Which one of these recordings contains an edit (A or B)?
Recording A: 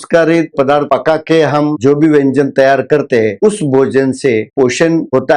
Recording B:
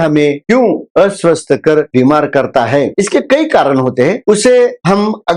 A